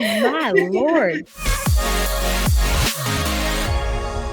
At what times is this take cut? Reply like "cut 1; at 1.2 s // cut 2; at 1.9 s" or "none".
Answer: cut 1; at 1.3 s

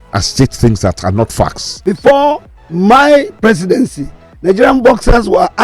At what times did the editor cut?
cut 1; at 1.7 s

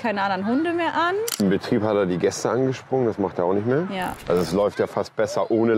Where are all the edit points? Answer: cut 1; at 1.3 s // cut 2; at 4.2 s

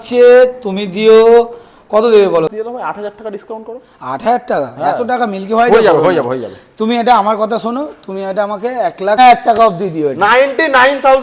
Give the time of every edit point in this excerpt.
cut 1; at 2.5 s // cut 2; at 9.2 s

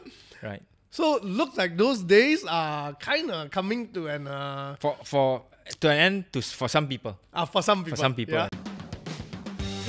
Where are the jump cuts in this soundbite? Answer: cut 1; at 8.5 s

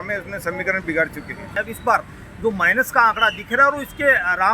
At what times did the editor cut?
cut 1; at 1.5 s

